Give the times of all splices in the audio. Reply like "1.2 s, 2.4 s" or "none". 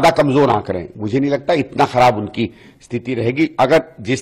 none